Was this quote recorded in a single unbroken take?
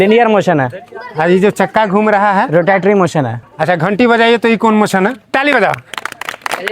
no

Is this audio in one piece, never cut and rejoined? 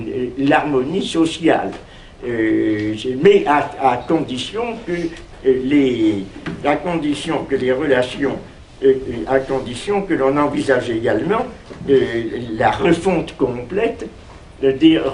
yes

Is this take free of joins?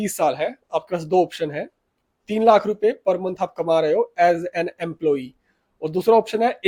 yes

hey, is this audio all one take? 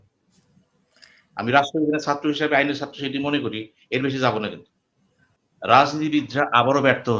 no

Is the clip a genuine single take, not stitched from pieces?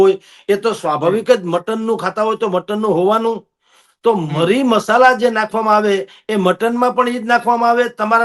yes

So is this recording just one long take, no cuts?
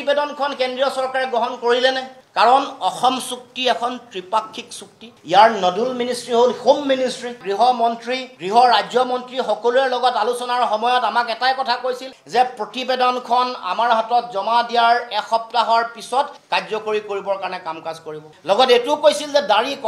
no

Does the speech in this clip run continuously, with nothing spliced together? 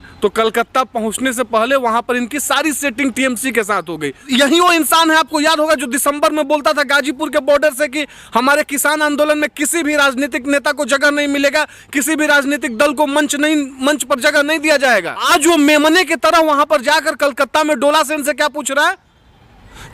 no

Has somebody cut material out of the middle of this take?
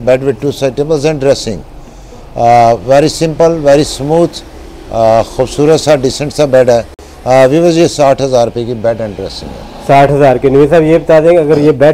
no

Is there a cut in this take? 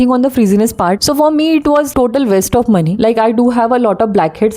yes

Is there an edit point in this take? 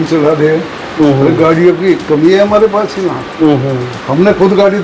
no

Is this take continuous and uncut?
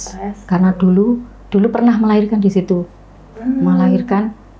yes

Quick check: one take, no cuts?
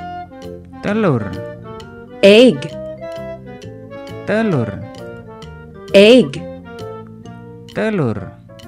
no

